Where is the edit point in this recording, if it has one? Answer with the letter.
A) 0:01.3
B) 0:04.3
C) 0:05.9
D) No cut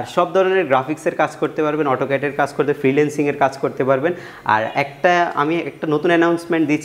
D